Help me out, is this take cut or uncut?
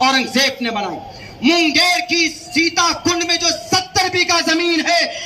uncut